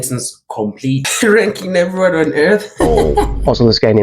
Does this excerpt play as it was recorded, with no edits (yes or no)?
no